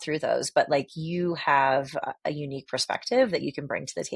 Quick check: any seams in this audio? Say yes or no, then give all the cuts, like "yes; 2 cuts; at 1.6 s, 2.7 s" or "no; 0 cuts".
no; 0 cuts